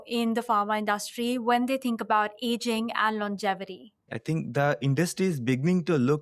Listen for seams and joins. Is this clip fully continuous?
no; 1 cut; at 4.1 s

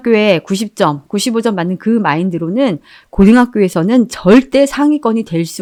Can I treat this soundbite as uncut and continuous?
yes; 0 cuts

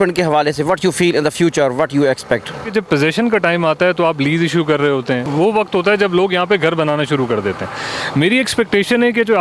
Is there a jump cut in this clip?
yes; 2 cuts; at 2.7 s, 5.3 s

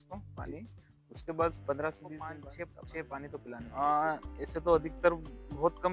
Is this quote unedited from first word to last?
no; 2 cuts; at 2.5 s, 3.7 s

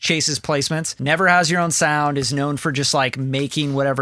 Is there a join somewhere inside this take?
yes; 1 cut; at 0.9 s

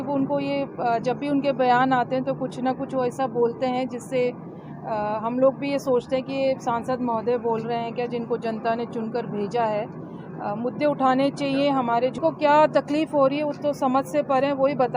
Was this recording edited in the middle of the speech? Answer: yes; 1 cut; at 12.2 s

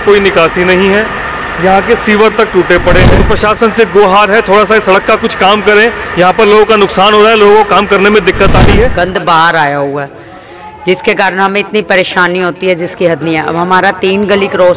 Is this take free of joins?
no; 2 cuts; at 3.2 s, 8.9 s

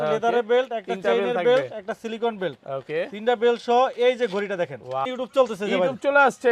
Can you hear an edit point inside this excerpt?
yes; 1 cut; at 5.1 s

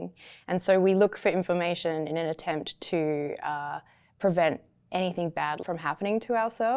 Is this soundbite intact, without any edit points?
no; 1 cut; at 5.6 s

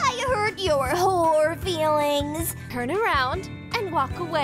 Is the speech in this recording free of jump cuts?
no; 1 cut; at 2.6 s

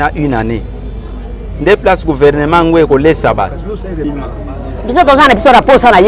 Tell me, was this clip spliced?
yes; 1 cut; at 4.0 s

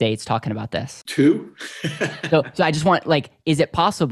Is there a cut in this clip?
yes; 1 cut; at 1.0 s

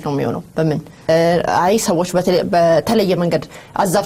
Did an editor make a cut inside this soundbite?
yes; 1 cut; at 1.1 s

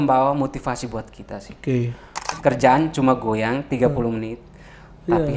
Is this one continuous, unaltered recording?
no; 1 cut; at 2.3 s

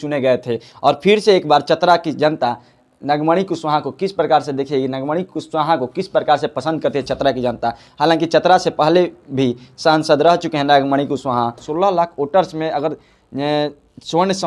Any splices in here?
yes; 1 cut; at 11.7 s

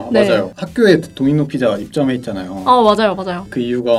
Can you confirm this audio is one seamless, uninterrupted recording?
yes; 0 cuts

